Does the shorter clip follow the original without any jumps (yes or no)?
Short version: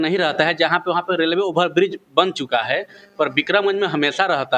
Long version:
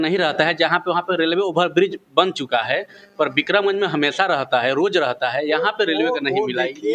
yes